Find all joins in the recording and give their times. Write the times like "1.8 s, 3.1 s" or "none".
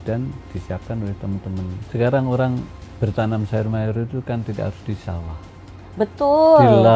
1.8 s